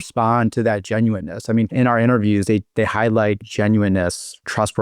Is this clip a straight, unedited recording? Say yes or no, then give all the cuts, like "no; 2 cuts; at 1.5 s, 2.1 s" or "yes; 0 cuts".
no; 2 cuts; at 1.7 s, 3.4 s